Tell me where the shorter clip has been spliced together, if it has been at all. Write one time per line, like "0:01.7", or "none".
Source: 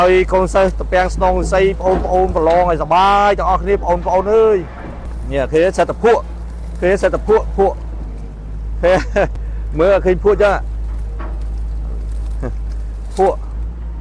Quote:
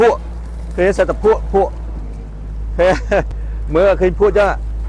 none